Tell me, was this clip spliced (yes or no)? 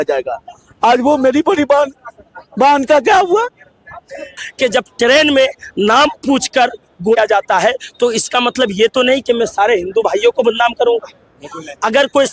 yes